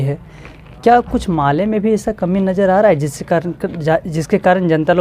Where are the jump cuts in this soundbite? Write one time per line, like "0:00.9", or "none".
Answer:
none